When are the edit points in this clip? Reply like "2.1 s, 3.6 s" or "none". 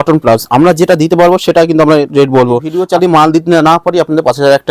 2.7 s